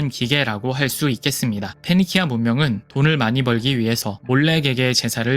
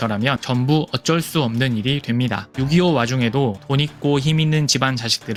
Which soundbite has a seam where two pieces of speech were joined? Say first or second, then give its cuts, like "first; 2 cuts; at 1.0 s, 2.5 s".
first; 2 cuts; at 2.8 s, 4.2 s